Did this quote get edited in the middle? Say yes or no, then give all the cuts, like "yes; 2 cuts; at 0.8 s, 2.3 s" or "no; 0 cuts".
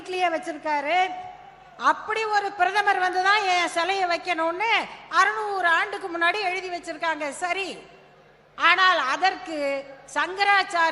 no; 0 cuts